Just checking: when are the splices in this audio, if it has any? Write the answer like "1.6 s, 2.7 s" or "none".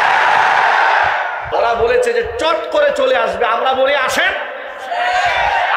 1.5 s